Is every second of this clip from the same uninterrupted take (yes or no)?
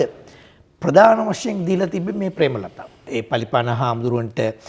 no